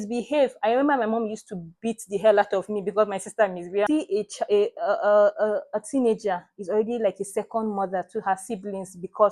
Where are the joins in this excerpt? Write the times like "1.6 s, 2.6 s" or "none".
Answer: 3.9 s

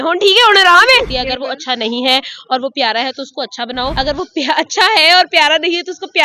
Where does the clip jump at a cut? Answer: 1.1 s, 3.9 s

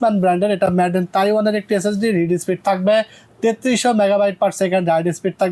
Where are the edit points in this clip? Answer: none

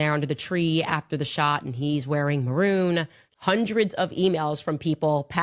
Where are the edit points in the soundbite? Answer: 3.2 s

